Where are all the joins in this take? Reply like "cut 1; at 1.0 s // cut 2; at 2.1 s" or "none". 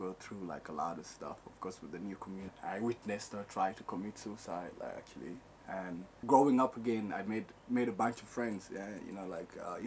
cut 1; at 2.5 s // cut 2; at 6.1 s